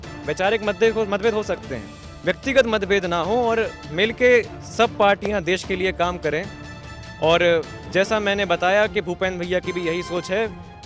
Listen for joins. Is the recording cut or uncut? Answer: uncut